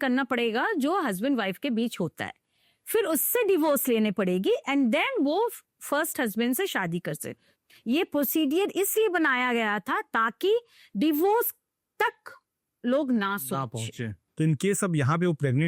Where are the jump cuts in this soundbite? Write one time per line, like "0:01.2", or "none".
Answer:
0:07.4
0:14.2

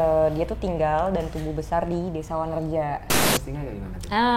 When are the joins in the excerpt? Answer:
0:03.2

